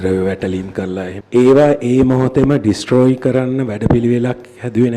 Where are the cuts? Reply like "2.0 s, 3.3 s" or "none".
1.1 s, 3.9 s